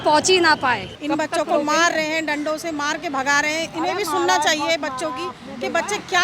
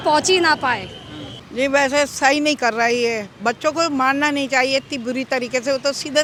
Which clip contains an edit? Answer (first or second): first